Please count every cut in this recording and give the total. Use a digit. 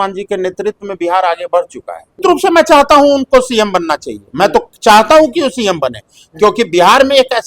1